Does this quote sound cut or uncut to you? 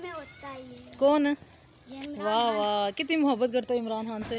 uncut